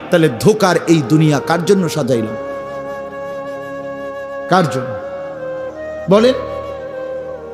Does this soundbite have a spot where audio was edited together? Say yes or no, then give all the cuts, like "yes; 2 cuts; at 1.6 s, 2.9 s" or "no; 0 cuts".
yes; 1 cut; at 6.6 s